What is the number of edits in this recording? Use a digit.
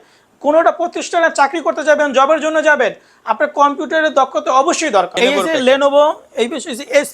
1